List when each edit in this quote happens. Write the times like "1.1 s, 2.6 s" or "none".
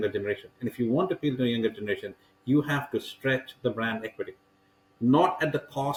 none